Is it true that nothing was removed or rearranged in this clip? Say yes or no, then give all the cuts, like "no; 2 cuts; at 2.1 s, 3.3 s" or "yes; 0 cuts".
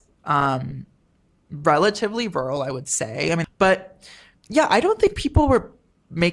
no; 1 cut; at 3.4 s